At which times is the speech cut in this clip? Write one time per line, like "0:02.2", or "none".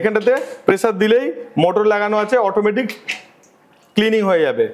none

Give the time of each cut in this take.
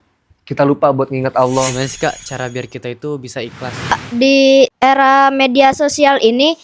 0:01.7
0:03.9
0:04.7

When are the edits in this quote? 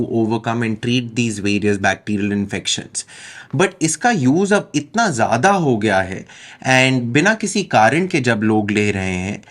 none

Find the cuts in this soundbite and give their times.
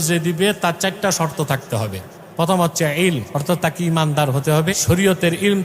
0:02.1
0:03.3
0:04.7

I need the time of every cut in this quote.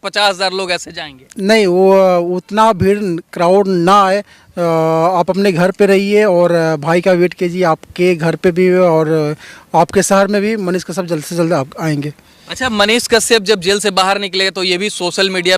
none

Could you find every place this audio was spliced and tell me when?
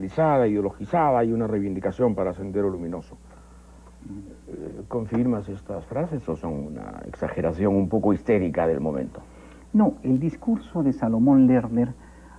none

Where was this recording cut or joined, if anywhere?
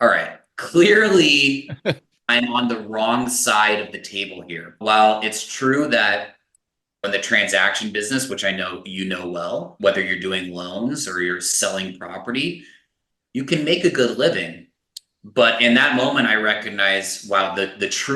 0:02.3
0:07.0
0:09.7

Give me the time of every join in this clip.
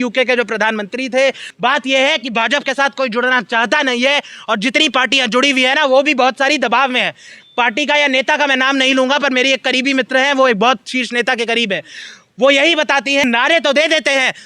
0:01.5
0:13.2

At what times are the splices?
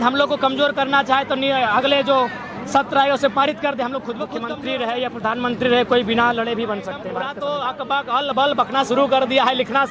0:04.4
0:07.0

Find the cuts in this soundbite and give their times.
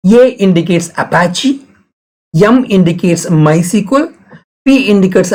none

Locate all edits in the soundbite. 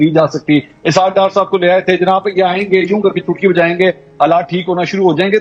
none

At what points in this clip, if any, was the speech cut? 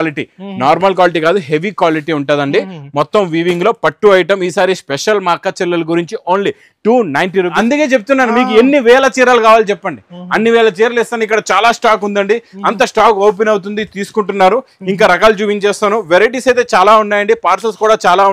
0:07.6

